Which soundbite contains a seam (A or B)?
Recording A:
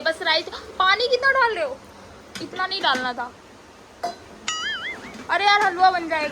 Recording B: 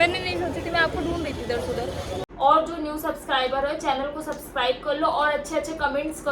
B